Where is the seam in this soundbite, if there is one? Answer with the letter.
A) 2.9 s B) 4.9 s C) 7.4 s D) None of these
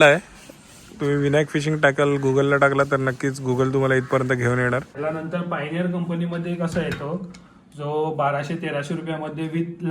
B